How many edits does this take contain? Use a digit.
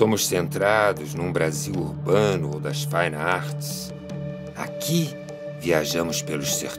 1